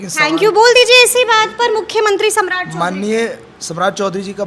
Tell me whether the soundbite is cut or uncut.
uncut